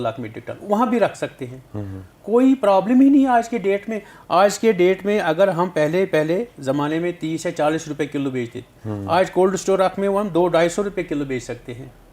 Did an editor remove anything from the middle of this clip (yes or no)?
no